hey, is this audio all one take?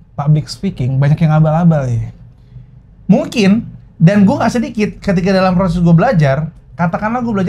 yes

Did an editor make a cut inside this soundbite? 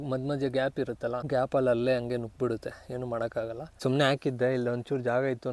yes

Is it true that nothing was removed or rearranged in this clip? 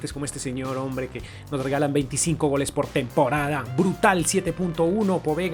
yes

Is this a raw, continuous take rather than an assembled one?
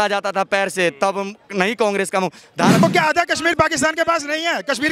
no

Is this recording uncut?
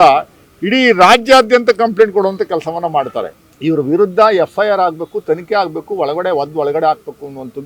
no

